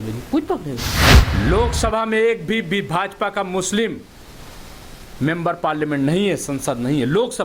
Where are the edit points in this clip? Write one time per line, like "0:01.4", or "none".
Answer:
0:01.3